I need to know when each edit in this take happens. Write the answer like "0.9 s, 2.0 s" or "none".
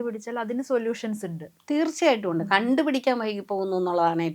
none